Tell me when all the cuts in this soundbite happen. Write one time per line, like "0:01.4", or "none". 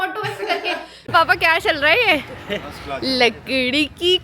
0:01.1